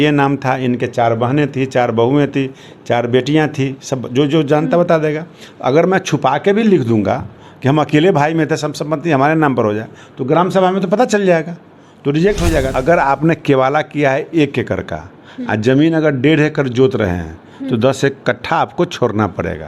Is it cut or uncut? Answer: cut